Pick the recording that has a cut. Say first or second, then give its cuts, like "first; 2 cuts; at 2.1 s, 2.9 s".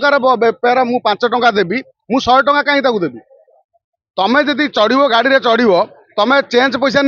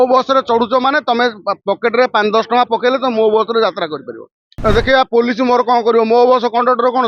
second; 1 cut; at 4.5 s